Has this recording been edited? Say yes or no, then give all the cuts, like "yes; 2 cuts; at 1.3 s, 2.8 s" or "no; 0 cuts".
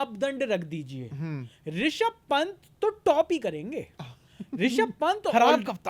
no; 0 cuts